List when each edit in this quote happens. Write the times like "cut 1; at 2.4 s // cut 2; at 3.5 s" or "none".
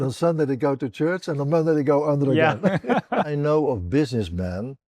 cut 1; at 3.3 s